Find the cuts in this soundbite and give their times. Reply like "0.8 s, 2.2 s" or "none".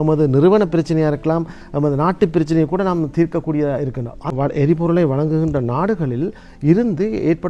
4.3 s